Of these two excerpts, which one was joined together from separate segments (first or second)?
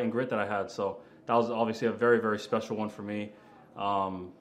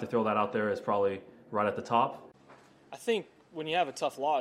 second